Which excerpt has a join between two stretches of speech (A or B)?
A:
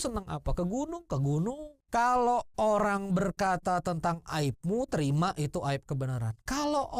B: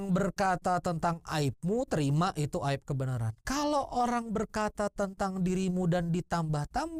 A